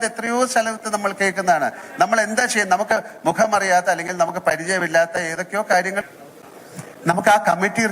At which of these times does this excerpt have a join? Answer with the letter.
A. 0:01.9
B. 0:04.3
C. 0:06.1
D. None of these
C